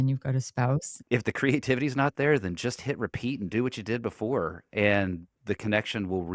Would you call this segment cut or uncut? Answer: cut